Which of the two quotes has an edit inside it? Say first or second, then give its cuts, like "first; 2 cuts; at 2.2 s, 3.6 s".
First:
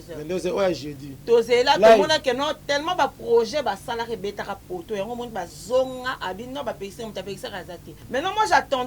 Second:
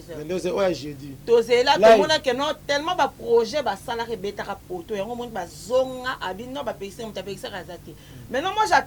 first; 1 cut; at 7.9 s